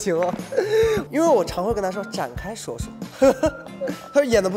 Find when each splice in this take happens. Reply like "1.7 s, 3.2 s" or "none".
1.1 s